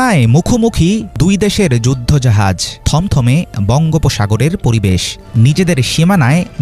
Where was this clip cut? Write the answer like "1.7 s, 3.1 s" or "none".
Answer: 5.2 s